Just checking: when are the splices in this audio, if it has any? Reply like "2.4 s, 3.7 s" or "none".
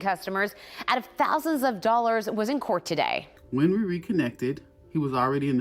3.3 s